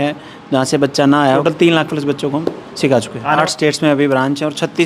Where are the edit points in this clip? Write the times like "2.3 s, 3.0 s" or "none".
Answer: 1.4 s, 3.4 s